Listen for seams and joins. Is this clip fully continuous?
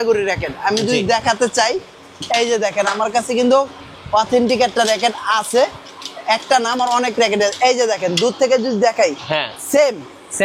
yes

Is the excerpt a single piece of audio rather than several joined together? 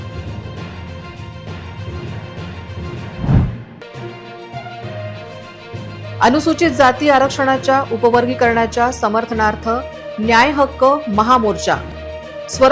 no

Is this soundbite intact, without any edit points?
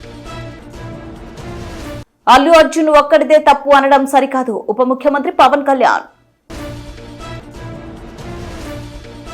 no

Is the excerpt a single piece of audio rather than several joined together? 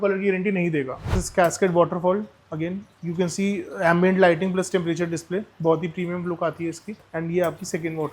no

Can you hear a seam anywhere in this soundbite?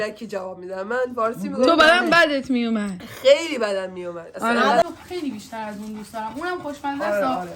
yes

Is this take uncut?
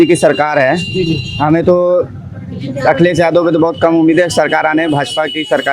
yes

